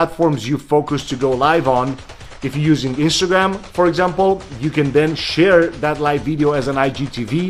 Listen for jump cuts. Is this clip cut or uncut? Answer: uncut